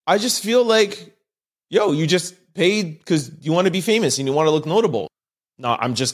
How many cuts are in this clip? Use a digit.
1